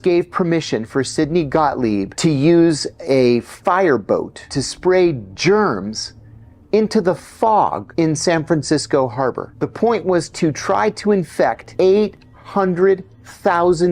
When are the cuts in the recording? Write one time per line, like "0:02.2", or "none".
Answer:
0:02.1
0:04.6
0:07.8
0:09.5
0:11.6